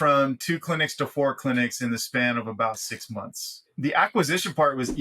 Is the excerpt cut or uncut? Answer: cut